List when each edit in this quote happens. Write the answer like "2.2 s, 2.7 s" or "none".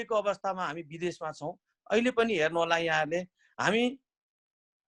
none